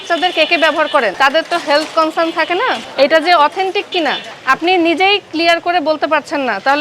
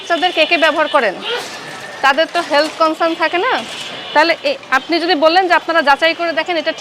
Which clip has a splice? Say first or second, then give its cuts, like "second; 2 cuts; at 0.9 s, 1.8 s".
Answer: first; 3 cuts; at 1.1 s, 2.8 s, 4.3 s